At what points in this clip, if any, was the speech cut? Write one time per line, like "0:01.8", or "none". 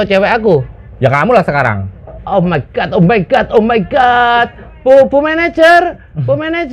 none